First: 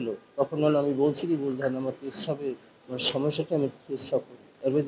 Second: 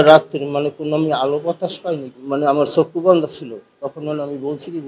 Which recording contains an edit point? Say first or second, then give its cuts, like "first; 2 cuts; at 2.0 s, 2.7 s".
second; 1 cut; at 2.1 s